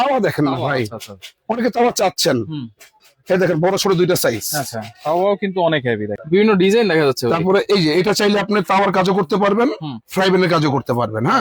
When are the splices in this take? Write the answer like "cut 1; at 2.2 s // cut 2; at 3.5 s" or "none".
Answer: cut 1; at 6.1 s